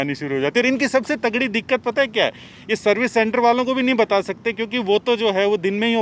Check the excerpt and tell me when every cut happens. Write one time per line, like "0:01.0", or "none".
none